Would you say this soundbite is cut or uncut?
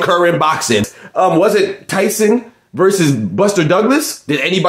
cut